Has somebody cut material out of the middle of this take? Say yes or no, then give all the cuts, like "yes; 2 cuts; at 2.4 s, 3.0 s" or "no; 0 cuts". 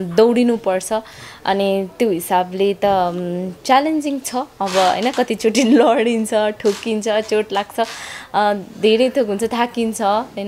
no; 0 cuts